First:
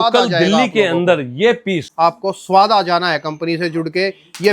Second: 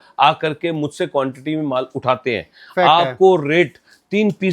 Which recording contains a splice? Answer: first; 1 cut; at 1.9 s

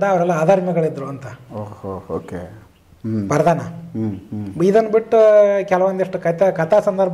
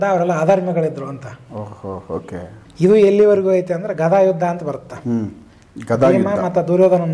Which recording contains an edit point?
second; 1 cut; at 2.6 s

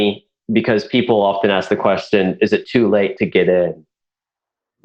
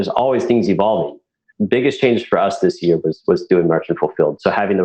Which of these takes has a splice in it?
second; 1 cut; at 1.4 s

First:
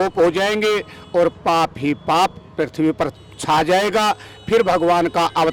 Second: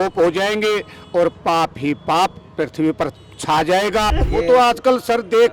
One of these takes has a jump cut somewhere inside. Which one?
second; 1 cut; at 4.1 s

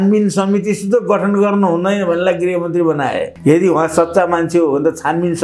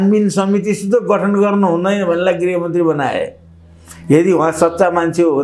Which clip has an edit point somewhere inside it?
first; 1 cut; at 3.3 s

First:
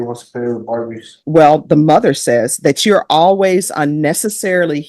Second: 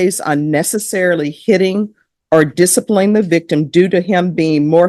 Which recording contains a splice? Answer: first; 1 cut; at 1.1 s

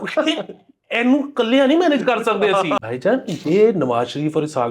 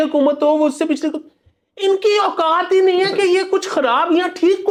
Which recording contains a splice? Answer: first; 1 cut; at 2.8 s

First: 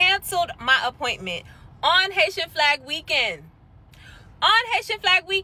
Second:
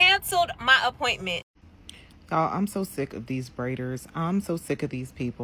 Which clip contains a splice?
second; 1 cut; at 1.7 s

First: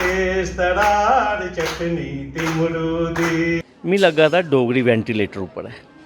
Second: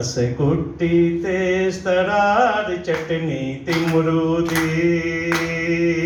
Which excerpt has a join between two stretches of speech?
first; 1 cut; at 3.6 s

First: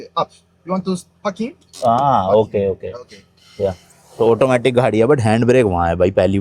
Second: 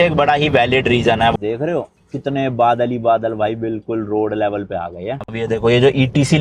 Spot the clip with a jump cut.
second; 2 cuts; at 1.3 s, 5.1 s

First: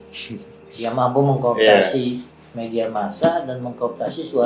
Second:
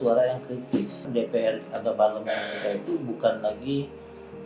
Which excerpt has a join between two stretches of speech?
second; 1 cut; at 1.0 s

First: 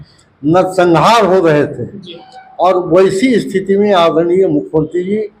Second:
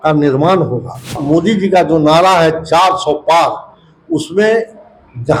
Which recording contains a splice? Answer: second; 1 cut; at 1.2 s

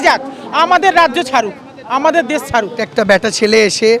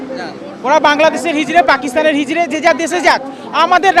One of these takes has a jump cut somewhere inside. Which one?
first; 1 cut; at 2.8 s

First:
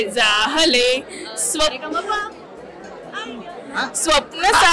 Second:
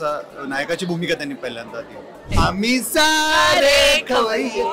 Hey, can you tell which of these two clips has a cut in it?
second; 1 cut; at 2.3 s

